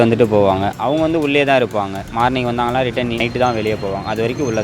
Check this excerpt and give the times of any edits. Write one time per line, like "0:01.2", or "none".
0:02.0
0:03.2